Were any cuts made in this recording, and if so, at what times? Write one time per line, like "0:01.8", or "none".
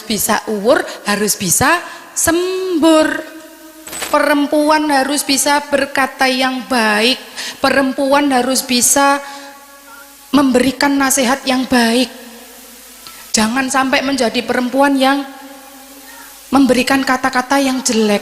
0:04.0